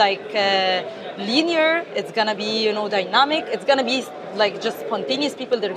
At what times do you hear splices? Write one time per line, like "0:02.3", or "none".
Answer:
none